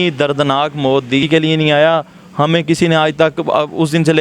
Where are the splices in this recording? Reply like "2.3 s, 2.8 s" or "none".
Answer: 1.2 s